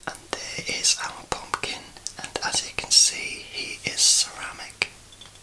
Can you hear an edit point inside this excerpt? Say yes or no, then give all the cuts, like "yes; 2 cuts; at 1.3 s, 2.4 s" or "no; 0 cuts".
no; 0 cuts